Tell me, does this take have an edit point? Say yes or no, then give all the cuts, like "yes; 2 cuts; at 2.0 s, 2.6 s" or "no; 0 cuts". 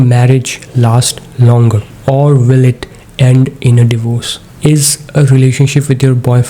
no; 0 cuts